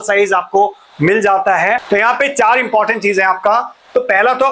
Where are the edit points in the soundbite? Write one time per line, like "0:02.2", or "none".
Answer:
0:01.8